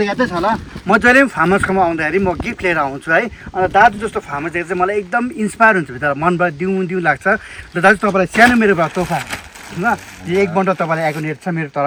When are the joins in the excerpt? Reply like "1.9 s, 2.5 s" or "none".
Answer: none

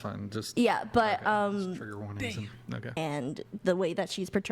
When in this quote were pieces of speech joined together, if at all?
3.0 s

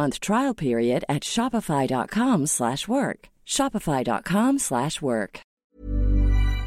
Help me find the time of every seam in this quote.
5.4 s

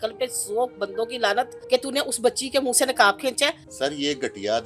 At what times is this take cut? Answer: 1.6 s, 3.7 s

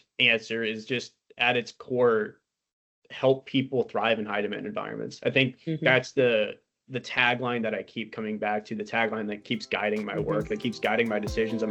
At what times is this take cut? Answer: none

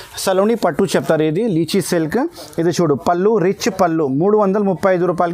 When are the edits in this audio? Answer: none

